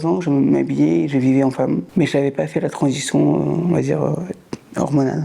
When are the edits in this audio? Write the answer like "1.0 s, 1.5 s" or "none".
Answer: 1.9 s